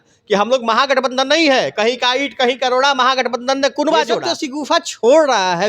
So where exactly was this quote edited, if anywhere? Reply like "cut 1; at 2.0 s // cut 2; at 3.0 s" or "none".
cut 1; at 4.3 s